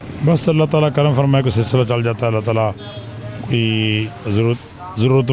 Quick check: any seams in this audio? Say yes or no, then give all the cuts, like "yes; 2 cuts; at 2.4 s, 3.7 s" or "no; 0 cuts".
no; 0 cuts